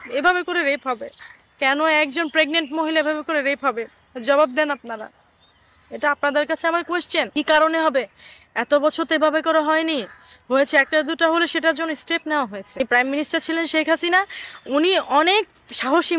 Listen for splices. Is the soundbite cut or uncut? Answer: cut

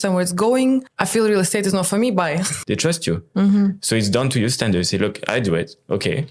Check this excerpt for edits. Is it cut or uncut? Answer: cut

